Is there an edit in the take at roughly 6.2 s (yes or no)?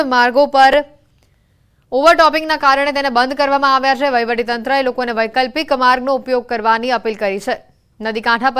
yes